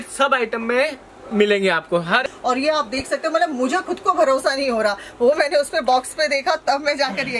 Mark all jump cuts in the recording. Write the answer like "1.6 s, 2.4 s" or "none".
2.2 s